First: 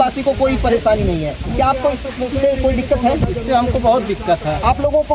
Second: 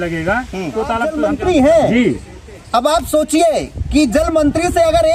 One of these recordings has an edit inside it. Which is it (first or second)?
second